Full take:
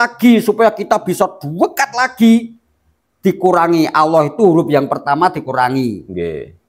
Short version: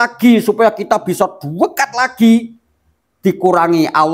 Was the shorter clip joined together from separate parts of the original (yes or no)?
no